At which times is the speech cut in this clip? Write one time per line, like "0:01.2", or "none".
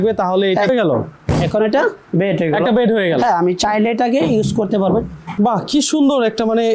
0:00.7
0:05.3